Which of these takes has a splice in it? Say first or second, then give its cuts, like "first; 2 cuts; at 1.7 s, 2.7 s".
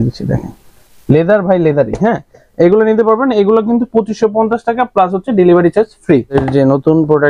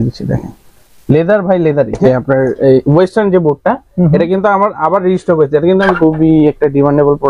second; 2 cuts; at 2.0 s, 5.9 s